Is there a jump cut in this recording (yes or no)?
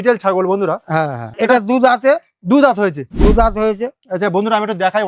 no